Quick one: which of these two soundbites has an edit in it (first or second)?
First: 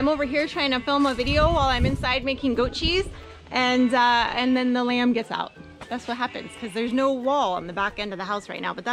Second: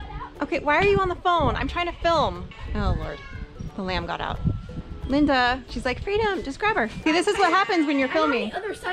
second